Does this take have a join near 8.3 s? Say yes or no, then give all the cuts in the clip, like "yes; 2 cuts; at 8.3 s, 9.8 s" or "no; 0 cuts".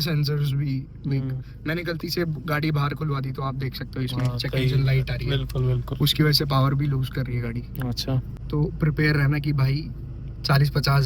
yes; 1 cut; at 8.3 s